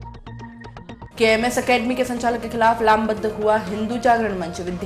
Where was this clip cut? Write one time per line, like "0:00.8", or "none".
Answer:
0:01.0